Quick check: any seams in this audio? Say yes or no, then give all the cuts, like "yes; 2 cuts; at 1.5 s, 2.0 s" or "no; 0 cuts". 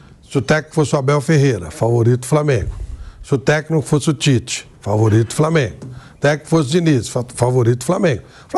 no; 0 cuts